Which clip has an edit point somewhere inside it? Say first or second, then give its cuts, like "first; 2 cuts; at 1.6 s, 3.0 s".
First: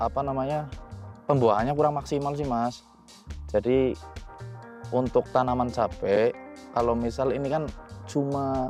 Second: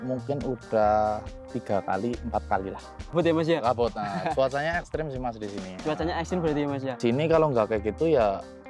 second; 2 cuts; at 3.1 s, 7.0 s